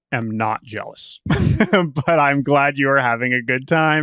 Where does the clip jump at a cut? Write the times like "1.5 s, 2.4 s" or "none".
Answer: none